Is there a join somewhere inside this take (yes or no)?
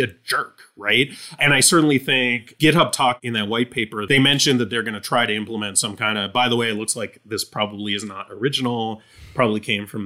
yes